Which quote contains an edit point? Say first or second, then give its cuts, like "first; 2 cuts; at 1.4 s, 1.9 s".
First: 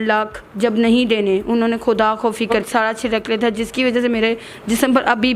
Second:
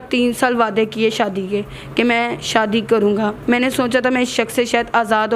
first; 1 cut; at 2.7 s